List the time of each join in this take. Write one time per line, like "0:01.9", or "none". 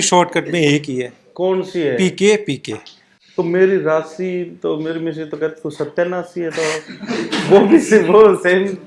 none